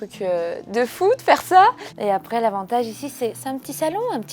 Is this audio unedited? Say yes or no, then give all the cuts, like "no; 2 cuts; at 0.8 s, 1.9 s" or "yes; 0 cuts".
no; 1 cut; at 1.9 s